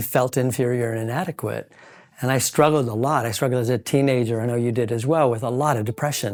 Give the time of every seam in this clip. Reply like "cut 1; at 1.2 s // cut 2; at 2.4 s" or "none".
none